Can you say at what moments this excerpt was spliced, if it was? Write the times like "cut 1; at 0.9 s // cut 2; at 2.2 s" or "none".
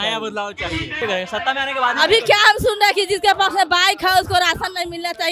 cut 1; at 1.0 s